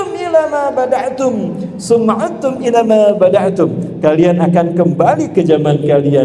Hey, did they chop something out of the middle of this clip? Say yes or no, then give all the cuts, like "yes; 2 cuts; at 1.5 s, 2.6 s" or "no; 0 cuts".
no; 0 cuts